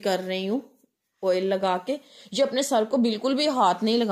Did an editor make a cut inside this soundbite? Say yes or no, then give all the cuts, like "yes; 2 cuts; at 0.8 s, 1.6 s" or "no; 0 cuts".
no; 0 cuts